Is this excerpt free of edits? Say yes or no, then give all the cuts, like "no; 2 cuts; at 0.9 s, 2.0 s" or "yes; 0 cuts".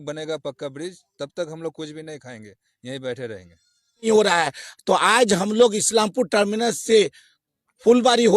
no; 1 cut; at 4.1 s